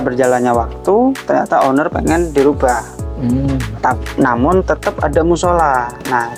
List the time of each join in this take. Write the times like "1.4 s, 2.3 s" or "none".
none